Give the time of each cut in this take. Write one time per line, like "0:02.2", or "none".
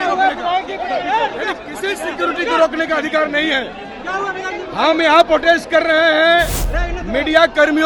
none